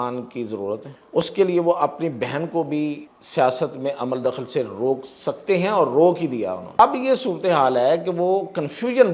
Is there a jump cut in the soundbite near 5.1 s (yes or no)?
no